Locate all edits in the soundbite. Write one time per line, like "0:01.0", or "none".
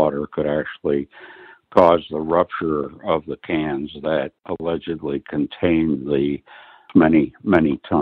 0:04.4
0:06.9